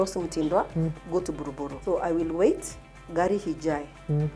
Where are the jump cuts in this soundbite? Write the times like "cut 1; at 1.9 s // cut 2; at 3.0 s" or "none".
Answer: cut 1; at 1.7 s